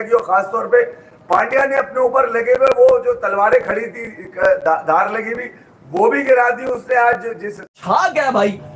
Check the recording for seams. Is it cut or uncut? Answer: cut